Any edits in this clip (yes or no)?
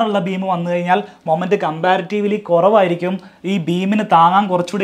no